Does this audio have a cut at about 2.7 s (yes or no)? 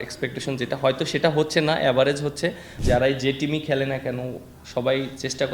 yes